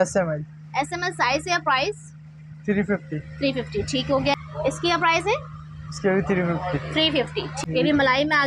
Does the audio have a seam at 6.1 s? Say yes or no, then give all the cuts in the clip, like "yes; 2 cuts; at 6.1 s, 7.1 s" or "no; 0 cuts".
no; 2 cuts; at 4.4 s, 7.5 s